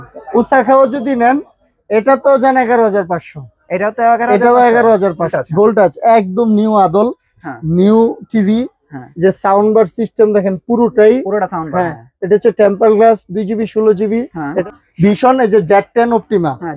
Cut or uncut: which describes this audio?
cut